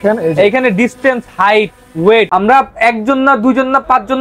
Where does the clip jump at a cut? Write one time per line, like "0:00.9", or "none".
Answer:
0:02.3